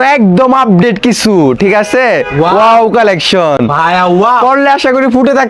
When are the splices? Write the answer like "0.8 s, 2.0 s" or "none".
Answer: none